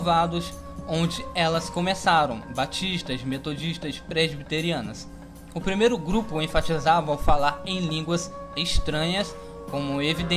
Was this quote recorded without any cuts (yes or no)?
yes